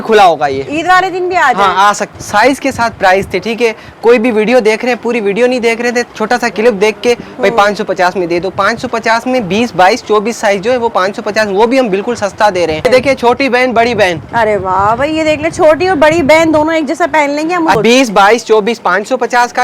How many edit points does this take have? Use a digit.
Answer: 3